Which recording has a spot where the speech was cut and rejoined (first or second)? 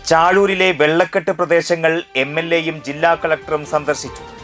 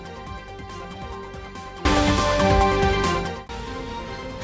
second